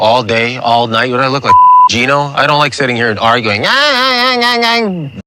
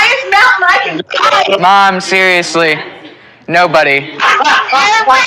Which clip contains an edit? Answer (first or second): second